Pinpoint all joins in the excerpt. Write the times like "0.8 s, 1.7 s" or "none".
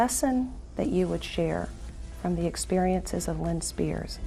none